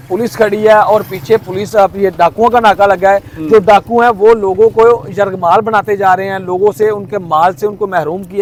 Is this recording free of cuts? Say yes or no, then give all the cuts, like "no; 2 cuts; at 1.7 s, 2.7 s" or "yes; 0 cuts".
yes; 0 cuts